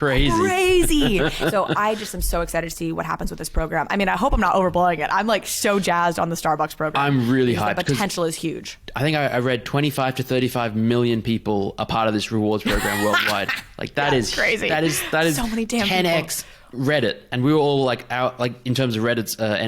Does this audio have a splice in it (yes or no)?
yes